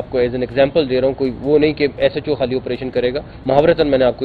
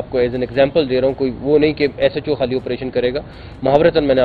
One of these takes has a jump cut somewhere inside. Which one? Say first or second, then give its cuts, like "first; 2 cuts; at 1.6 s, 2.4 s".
first; 1 cut; at 3.3 s